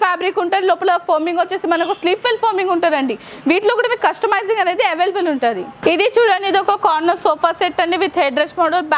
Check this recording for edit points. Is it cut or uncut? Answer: uncut